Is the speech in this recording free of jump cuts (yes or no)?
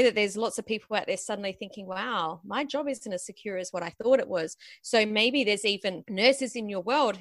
yes